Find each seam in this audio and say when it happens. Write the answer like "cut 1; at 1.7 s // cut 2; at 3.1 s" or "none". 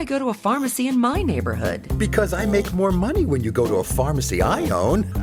none